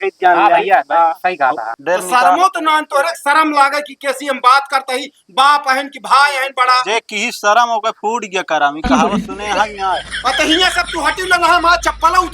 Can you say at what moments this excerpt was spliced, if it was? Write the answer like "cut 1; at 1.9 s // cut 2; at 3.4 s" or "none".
cut 1; at 1.7 s

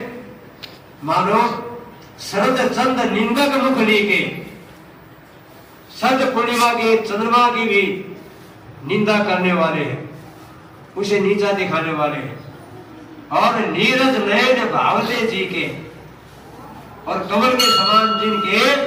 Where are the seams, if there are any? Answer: none

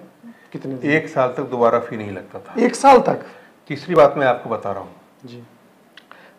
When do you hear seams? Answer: none

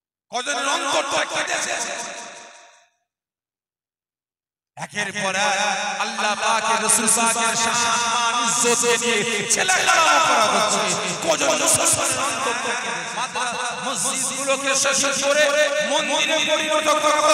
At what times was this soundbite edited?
cut 1; at 12.8 s

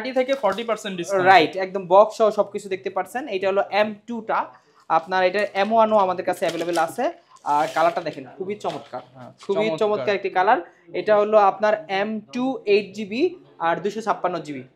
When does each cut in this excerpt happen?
none

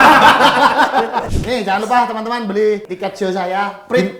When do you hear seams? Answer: cut 1; at 1.3 s // cut 2; at 2.9 s

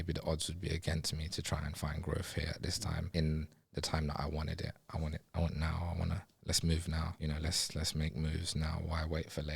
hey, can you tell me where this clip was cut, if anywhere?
cut 1; at 3.1 s // cut 2; at 7.2 s

